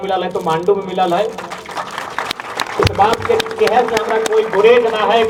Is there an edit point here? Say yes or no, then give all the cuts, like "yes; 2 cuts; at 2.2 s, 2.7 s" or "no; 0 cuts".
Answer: no; 0 cuts